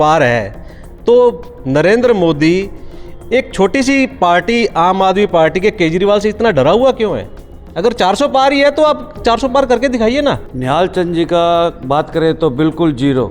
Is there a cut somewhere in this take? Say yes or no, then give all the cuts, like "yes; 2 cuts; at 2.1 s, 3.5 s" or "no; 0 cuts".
yes; 1 cut; at 10.5 s